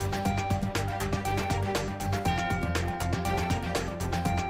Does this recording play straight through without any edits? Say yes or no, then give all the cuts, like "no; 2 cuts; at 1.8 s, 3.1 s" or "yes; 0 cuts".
yes; 0 cuts